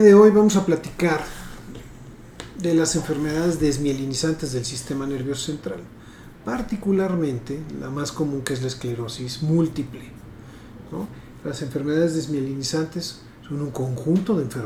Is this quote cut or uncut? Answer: uncut